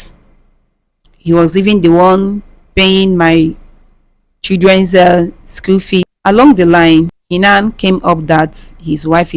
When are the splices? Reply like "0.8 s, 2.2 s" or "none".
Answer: 6.1 s, 7.2 s